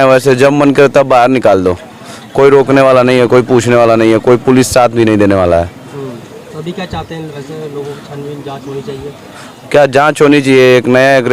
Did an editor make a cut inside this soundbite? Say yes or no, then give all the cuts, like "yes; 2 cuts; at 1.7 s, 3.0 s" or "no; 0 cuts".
no; 0 cuts